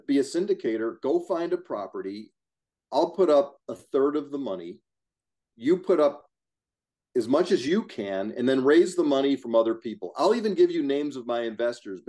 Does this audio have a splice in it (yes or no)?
no